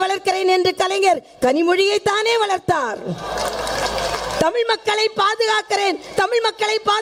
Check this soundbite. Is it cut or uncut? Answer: uncut